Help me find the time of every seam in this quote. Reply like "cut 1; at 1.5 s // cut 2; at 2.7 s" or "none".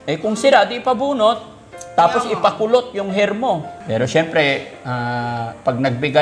cut 1; at 3.7 s